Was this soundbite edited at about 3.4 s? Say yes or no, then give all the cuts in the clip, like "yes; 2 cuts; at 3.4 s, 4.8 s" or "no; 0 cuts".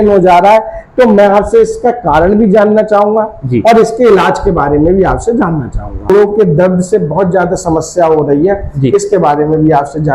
no; 1 cut; at 6.1 s